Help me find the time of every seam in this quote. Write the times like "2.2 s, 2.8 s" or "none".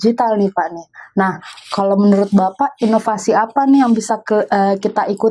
none